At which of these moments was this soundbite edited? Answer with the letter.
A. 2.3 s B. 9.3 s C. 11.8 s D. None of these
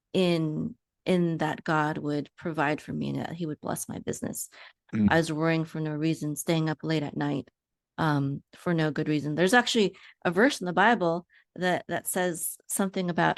D